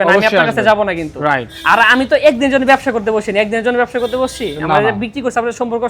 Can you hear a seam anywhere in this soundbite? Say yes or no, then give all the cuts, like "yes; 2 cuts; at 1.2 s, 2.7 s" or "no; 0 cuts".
no; 0 cuts